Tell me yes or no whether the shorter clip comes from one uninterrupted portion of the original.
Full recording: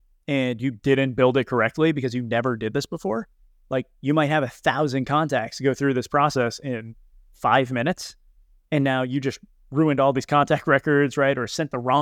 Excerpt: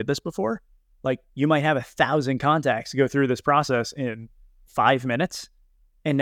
yes